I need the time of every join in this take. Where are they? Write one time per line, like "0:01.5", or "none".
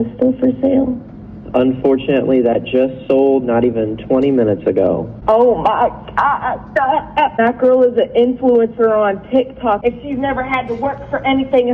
0:05.1
0:07.4
0:09.8